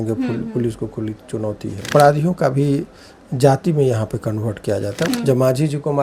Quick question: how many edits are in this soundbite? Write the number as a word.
two